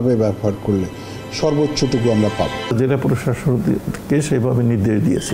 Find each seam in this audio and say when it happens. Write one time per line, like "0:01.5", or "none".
0:02.7